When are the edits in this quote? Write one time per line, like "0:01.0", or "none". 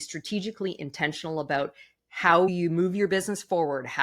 0:02.5